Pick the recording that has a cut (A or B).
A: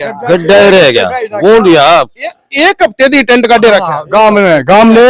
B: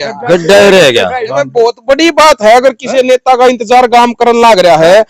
B